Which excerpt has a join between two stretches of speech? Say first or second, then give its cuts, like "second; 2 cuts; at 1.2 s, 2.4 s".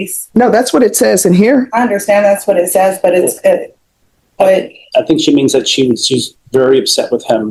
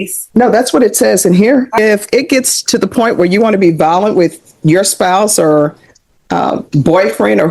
second; 1 cut; at 1.8 s